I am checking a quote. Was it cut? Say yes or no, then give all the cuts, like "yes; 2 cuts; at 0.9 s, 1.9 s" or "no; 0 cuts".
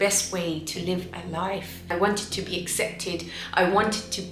yes; 1 cut; at 1.9 s